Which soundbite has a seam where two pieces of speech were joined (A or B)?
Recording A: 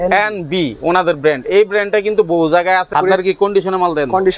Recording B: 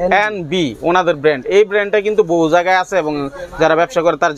A